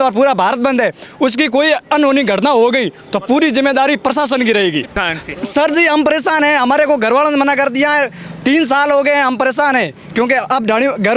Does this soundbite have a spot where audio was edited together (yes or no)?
yes